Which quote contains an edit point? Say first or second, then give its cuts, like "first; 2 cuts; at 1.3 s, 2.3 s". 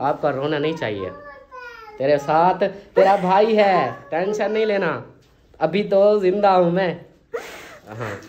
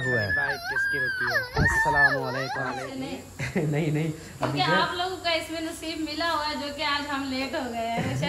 second; 1 cut; at 2.8 s